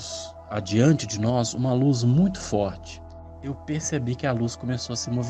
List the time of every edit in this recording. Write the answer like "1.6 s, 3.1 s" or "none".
2.8 s